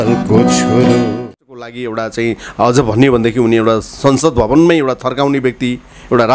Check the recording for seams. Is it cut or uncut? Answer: cut